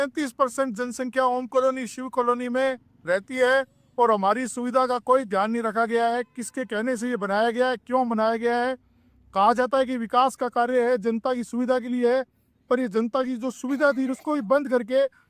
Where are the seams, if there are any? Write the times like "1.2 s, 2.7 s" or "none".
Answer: none